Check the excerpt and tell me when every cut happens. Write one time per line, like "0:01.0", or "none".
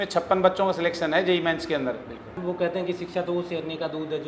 0:02.3